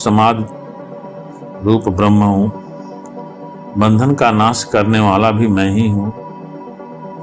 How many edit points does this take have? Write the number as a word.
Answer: zero